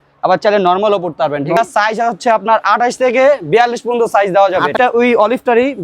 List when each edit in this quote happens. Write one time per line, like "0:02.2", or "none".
0:01.6
0:04.8